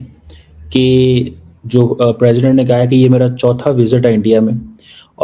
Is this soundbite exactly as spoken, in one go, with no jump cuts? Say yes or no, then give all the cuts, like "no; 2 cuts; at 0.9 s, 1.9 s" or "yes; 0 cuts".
yes; 0 cuts